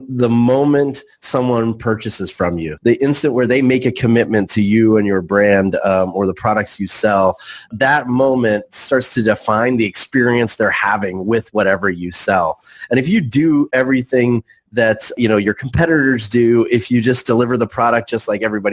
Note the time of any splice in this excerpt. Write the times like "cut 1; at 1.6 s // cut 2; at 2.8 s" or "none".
cut 1; at 2.7 s // cut 2; at 7.7 s // cut 3; at 15.1 s